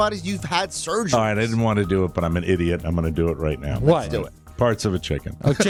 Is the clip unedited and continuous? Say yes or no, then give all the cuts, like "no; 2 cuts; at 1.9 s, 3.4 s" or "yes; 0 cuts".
yes; 0 cuts